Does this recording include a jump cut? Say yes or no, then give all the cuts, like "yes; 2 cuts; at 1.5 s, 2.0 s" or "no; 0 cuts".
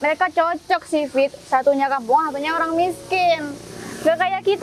no; 0 cuts